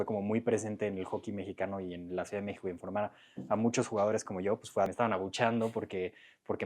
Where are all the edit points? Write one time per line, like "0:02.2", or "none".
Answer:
0:04.9

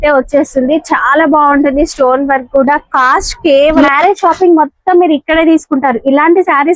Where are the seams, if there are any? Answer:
0:03.8

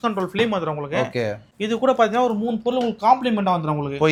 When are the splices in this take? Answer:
none

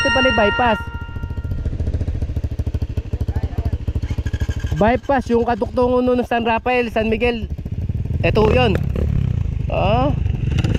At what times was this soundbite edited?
none

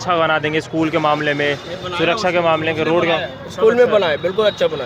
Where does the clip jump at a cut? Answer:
none

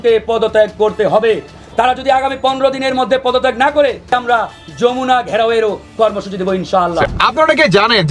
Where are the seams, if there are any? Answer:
0:07.1

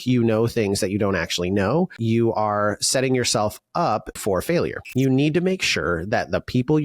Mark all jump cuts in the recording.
0:04.5

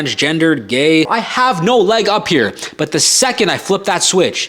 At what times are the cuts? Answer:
0:01.1

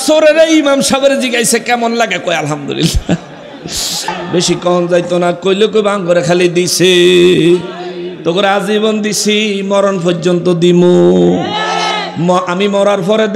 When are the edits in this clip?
0:04.1

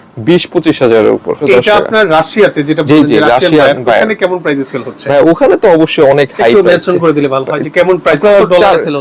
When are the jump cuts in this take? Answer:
0:01.4

